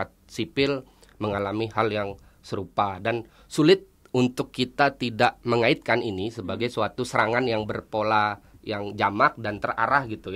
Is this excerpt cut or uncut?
uncut